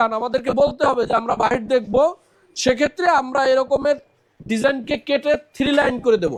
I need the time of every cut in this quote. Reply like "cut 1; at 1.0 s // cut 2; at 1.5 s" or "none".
none